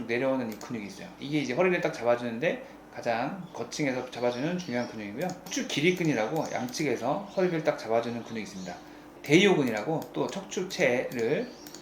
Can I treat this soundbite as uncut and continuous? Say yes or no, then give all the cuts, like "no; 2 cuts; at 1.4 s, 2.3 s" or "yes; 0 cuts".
no; 2 cuts; at 5.5 s, 9.0 s